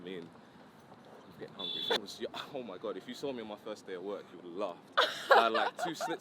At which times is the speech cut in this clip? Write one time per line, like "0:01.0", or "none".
0:02.0